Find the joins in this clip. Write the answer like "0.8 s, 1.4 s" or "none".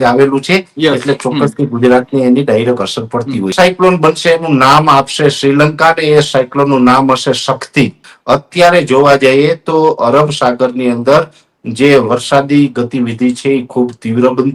3.5 s, 8.1 s